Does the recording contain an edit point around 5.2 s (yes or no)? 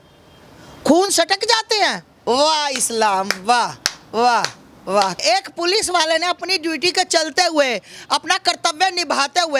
yes